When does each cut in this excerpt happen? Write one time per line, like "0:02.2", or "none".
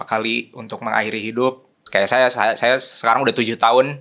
0:01.8